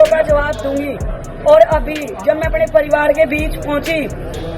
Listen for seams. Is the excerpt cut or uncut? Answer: uncut